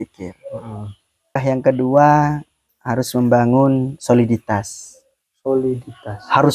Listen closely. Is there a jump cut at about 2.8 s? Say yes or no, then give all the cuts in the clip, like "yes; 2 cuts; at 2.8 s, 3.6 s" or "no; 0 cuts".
no; 1 cut; at 1.3 s